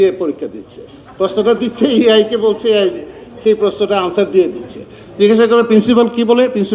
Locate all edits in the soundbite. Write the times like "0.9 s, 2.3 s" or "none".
5.0 s